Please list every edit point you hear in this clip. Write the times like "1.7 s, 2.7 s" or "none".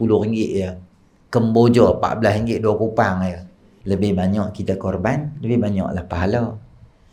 3.7 s